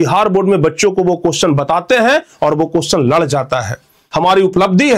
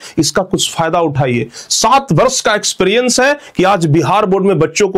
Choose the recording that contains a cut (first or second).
first